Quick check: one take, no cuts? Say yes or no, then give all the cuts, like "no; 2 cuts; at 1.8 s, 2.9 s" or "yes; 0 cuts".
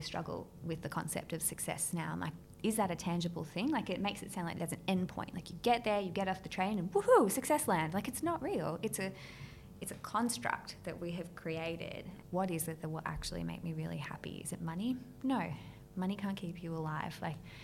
no; 2 cuts; at 2.4 s, 12.1 s